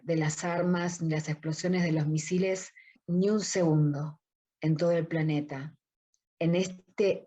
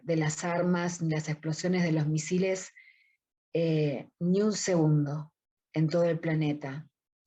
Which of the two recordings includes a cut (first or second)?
first